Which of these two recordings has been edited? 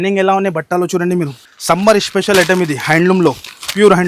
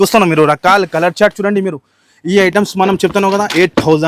first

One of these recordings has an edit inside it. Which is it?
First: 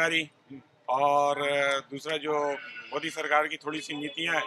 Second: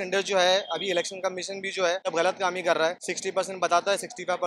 second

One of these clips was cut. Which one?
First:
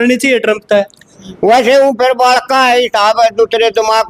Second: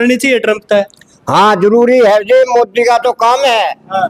first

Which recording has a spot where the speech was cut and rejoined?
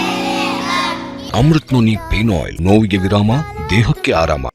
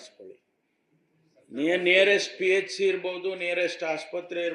first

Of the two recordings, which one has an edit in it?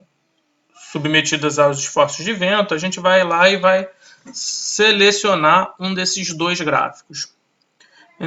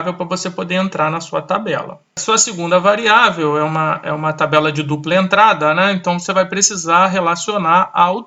second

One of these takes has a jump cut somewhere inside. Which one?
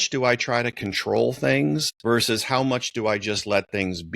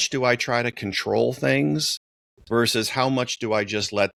first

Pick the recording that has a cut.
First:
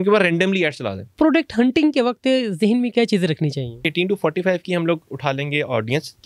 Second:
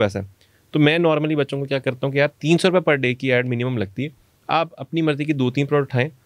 first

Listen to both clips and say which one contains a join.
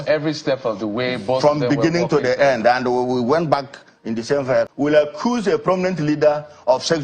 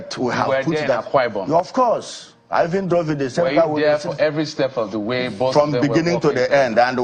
first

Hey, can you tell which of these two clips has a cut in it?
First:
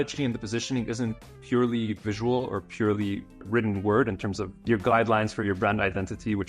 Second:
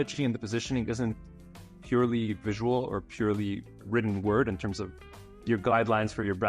first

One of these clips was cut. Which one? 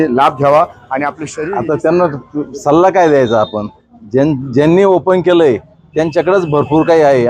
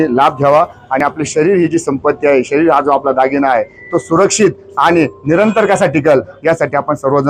first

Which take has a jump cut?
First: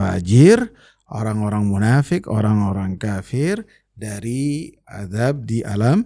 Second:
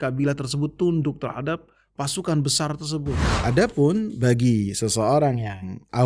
second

